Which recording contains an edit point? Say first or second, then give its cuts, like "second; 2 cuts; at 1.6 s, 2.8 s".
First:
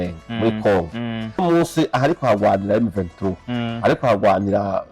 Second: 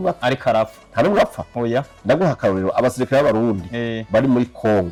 first; 1 cut; at 1.4 s